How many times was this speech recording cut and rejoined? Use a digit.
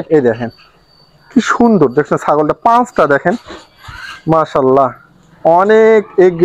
0